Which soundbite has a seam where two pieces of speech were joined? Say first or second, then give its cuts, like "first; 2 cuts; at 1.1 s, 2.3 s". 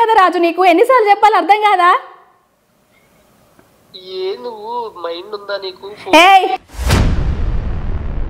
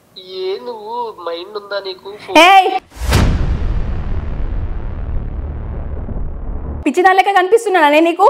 second; 1 cut; at 6.7 s